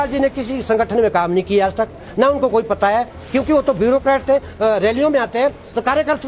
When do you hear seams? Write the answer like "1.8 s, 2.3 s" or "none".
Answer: 4.5 s